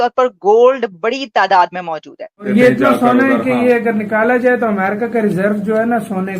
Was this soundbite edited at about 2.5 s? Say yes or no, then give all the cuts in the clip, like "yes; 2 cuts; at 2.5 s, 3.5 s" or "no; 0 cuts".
yes; 1 cut; at 2.5 s